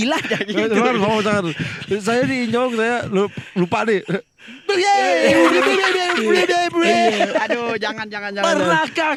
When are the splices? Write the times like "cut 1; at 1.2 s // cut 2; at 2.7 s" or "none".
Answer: none